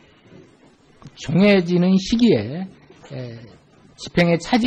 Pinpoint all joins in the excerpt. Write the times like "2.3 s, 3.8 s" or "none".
none